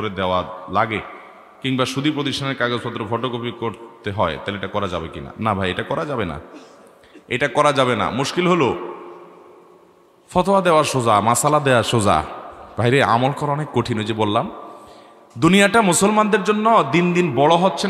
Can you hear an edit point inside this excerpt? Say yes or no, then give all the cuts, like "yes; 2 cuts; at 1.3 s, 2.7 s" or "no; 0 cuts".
no; 0 cuts